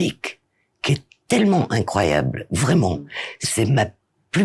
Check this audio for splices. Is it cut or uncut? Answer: uncut